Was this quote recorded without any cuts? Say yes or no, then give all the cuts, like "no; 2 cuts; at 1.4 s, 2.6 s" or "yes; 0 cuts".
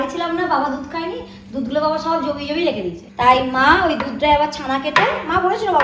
yes; 0 cuts